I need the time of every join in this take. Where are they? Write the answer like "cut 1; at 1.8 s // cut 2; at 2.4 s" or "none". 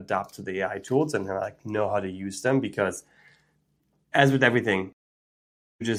none